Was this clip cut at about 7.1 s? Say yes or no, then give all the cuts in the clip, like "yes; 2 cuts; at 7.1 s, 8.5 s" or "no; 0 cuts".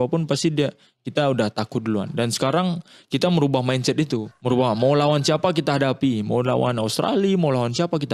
no; 1 cut; at 4.3 s